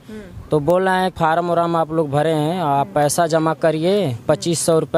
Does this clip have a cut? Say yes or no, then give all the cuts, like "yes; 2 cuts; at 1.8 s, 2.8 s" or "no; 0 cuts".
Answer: yes; 1 cut; at 1.1 s